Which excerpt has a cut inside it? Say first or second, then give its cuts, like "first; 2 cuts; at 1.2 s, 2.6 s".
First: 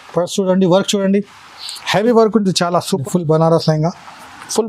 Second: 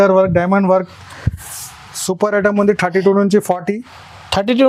first; 1 cut; at 3.0 s